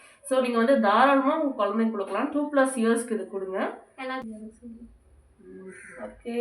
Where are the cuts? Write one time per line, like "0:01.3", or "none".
0:04.3